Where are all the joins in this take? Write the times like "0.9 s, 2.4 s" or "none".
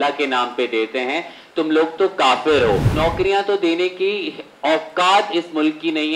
2.9 s